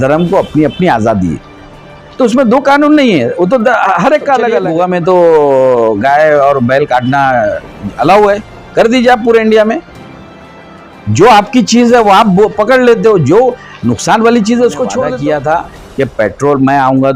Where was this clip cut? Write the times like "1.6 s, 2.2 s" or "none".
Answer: 4.6 s, 15.1 s